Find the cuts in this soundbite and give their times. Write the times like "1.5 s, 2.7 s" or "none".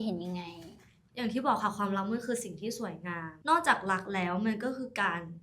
1.0 s